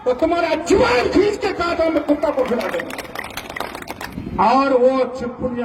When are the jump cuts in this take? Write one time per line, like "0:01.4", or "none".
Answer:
0:04.1